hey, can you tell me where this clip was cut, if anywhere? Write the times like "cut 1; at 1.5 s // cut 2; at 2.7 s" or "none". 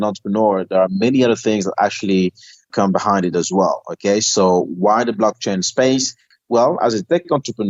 none